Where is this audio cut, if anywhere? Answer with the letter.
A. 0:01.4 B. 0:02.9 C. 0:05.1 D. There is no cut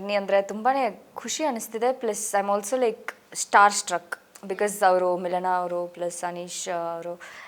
D